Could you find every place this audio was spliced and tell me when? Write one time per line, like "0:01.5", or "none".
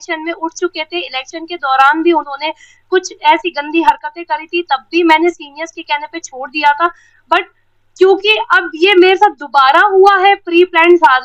none